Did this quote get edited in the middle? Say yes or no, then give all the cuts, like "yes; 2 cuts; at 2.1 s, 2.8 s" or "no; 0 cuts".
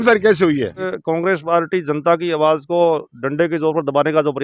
yes; 1 cut; at 0.9 s